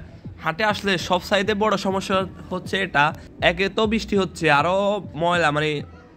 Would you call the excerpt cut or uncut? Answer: cut